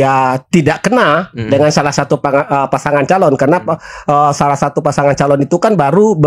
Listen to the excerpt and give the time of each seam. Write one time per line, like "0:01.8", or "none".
none